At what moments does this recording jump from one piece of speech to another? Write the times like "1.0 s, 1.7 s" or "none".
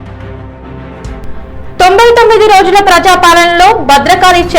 1.0 s